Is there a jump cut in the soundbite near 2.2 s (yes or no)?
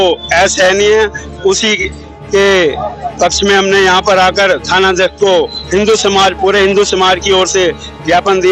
no